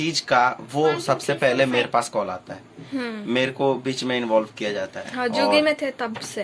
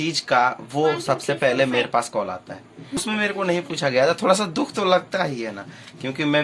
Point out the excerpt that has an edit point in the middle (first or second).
second